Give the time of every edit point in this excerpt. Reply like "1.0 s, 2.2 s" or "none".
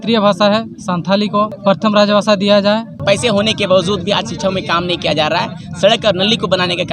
1.5 s, 3.0 s